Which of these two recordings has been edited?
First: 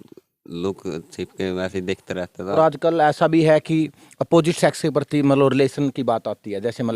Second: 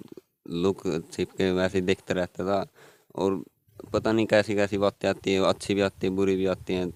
first; 1 cut; at 2.6 s

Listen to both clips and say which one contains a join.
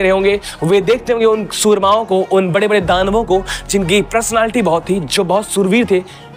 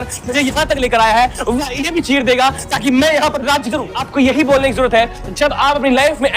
second; 1 cut; at 4.0 s

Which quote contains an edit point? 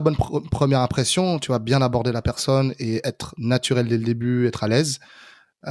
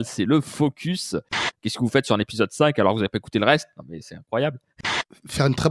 second; 2 cuts; at 1.5 s, 4.7 s

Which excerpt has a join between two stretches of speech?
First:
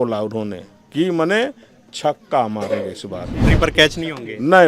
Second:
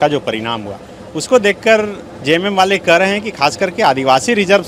first; 1 cut; at 3.4 s

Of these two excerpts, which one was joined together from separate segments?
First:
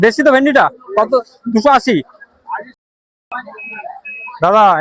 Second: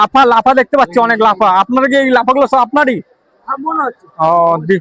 first; 1 cut; at 2.8 s

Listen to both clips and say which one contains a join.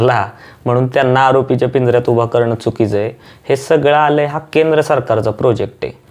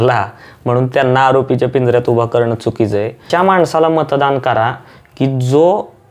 second; 1 cut; at 3.2 s

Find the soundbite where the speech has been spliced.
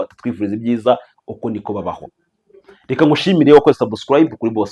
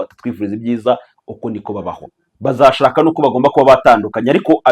second; 1 cut; at 2.2 s

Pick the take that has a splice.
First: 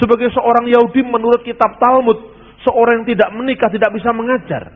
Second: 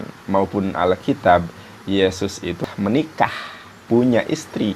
second; 2 cuts; at 2.6 s, 3.8 s

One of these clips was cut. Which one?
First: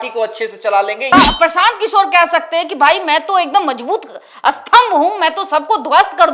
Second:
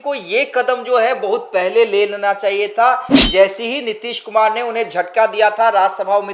first; 1 cut; at 1.1 s

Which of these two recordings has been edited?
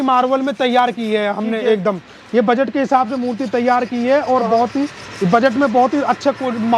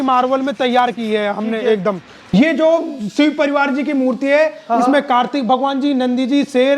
second; 1 cut; at 2.2 s

